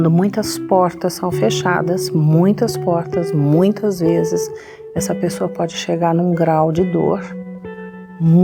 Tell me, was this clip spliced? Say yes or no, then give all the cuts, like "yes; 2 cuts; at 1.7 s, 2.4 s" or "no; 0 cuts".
no; 0 cuts